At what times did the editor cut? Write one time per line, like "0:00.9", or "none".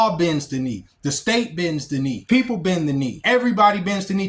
0:02.2
0:03.2